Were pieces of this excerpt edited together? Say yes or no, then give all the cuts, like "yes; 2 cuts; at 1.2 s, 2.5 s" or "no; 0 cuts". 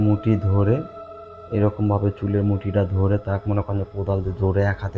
no; 0 cuts